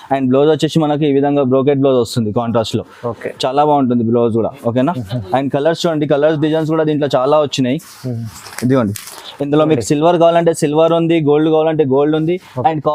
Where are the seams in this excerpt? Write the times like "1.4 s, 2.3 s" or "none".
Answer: none